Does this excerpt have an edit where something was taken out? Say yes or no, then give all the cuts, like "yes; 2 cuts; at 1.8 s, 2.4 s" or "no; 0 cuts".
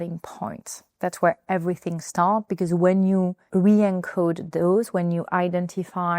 yes; 1 cut; at 3.4 s